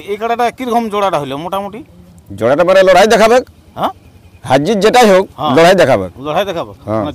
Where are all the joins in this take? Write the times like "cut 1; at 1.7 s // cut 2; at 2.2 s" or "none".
none